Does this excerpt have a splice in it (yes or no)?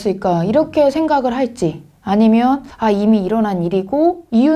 no